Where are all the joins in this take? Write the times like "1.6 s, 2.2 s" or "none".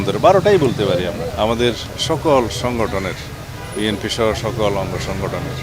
1.2 s

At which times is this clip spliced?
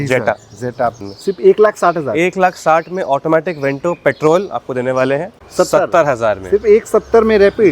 1.0 s, 5.3 s

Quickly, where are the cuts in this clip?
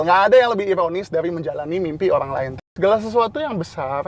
2.6 s

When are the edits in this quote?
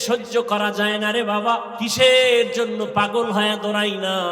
1.7 s

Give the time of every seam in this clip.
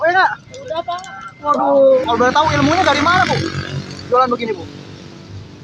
2.0 s

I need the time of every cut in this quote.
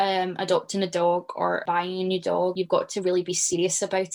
1.6 s, 2.5 s

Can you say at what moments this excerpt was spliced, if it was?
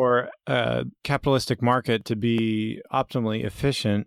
0.9 s

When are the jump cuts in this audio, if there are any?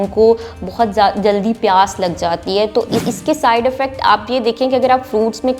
3.0 s

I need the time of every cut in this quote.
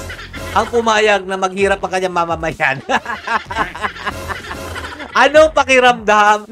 none

